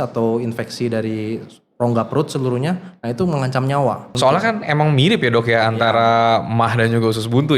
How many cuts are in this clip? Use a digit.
1